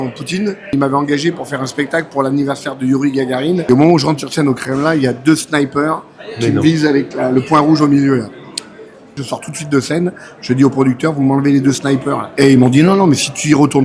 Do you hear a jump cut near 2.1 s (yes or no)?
no